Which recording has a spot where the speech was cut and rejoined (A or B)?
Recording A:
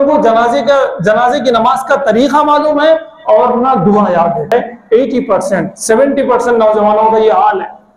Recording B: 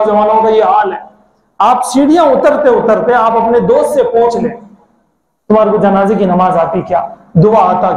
A